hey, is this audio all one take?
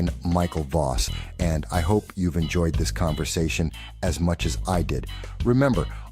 no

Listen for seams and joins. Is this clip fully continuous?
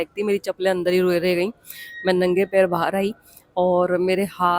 yes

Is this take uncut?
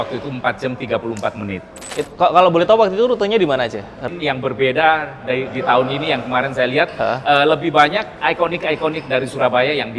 no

